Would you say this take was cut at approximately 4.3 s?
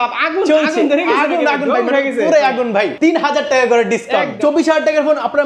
yes; 2 cuts; at 2.9 s, 4.3 s

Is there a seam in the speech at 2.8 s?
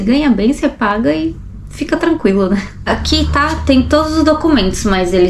yes; 1 cut; at 2.8 s

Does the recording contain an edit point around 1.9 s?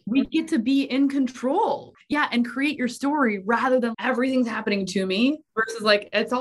yes; 2 cuts; at 1.9 s, 5.5 s

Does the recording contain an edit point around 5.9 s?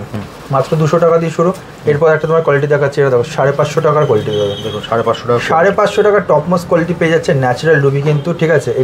no; 0 cuts

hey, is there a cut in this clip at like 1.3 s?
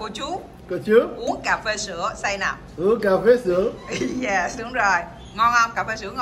yes; 1 cut; at 1.3 s

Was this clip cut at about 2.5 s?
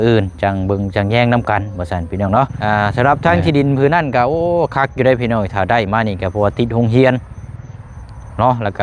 yes; 1 cut; at 2.5 s

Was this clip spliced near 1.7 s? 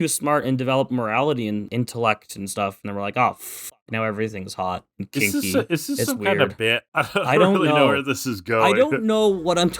yes; 1 cut; at 1.7 s

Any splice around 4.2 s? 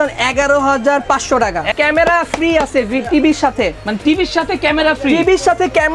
no; 1 cut; at 1.7 s

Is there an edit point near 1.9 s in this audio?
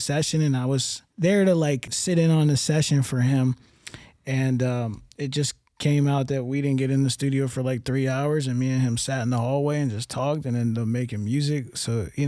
yes; 2 cuts; at 1.0 s, 1.9 s

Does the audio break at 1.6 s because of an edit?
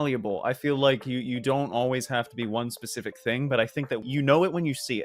no; 1 cut; at 4.0 s

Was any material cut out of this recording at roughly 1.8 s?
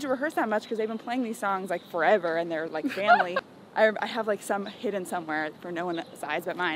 no; 1 cut; at 3.4 s

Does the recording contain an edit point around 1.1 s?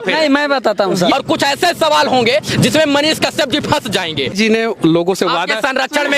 yes; 2 cuts; at 1.1 s, 4.3 s

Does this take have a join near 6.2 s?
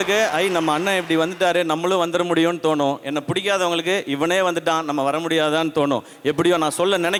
no; 0 cuts

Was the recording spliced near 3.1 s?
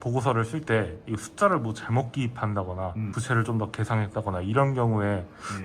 yes; 1 cut; at 3.1 s

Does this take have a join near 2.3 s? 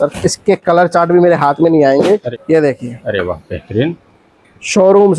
yes; 1 cut; at 2.3 s

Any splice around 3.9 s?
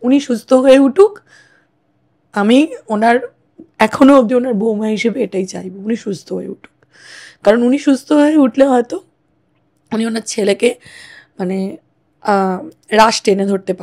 no; 0 cuts

